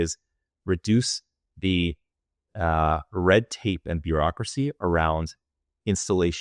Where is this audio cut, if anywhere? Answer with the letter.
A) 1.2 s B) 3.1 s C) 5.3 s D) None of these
D